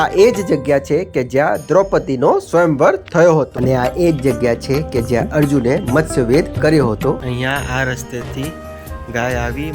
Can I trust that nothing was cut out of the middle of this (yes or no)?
no